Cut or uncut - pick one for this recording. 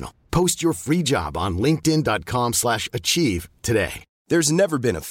cut